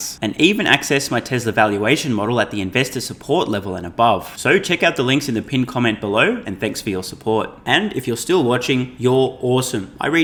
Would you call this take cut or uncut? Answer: uncut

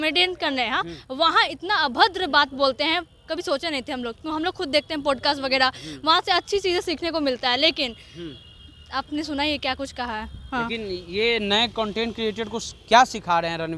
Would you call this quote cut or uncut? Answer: uncut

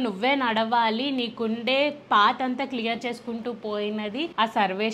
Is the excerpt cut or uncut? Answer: uncut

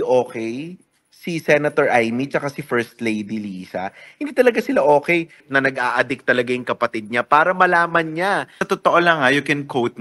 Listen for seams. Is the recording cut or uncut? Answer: cut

